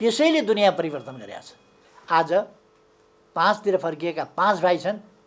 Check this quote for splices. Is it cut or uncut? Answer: cut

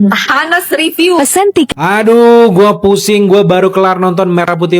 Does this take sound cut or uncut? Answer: cut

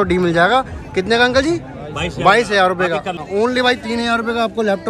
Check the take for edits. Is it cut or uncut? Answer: cut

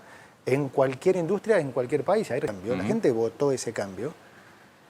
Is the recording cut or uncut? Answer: cut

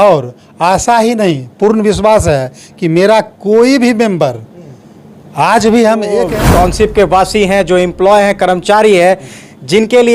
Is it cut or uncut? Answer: cut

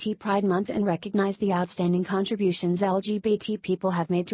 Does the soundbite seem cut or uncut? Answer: uncut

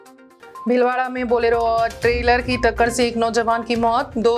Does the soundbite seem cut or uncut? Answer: uncut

